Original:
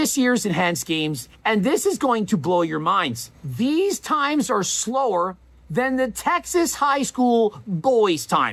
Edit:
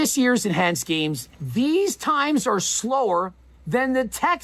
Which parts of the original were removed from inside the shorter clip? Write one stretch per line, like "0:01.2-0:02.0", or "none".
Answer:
0:01.3-0:03.3